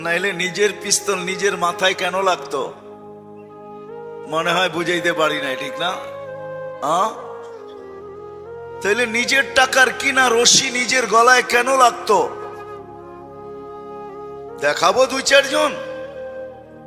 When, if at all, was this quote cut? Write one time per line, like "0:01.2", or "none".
0:07.3
0:08.8